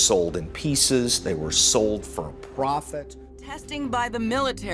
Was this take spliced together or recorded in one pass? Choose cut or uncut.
cut